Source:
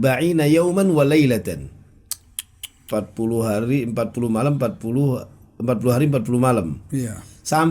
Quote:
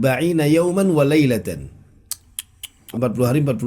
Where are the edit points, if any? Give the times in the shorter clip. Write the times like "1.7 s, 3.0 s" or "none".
2.7 s